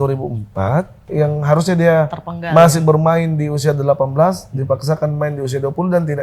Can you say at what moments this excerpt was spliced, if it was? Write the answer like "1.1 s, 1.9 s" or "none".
1.0 s